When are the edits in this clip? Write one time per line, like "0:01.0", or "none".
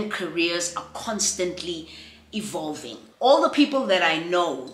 0:03.0